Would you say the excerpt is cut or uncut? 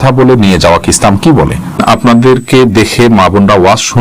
cut